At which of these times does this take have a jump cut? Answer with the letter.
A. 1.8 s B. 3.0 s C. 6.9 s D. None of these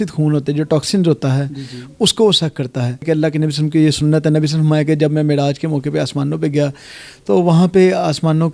B